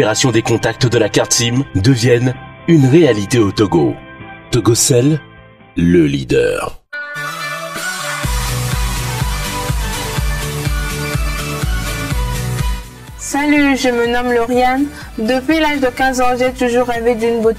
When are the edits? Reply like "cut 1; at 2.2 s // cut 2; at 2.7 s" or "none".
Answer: cut 1; at 6.8 s